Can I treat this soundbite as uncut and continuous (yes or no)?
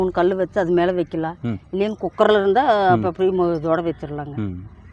yes